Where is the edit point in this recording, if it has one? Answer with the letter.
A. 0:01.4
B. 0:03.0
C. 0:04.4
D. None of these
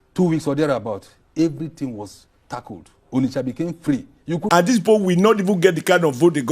C